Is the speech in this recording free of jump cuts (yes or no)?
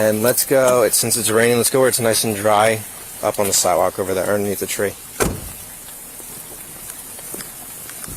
yes